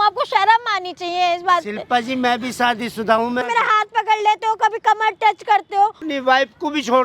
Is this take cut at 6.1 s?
yes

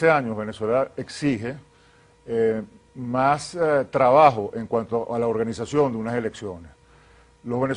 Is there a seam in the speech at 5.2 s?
yes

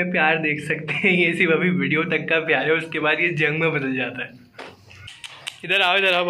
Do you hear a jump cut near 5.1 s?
yes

